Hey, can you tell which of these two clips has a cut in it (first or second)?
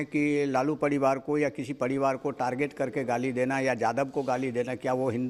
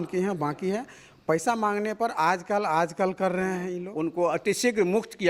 second